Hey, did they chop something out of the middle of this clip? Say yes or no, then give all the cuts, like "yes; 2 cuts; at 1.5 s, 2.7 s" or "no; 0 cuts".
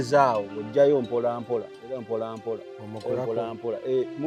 no; 0 cuts